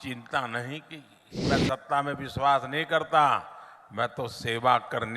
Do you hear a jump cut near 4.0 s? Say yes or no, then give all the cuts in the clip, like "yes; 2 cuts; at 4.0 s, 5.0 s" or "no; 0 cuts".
no; 1 cut; at 1.4 s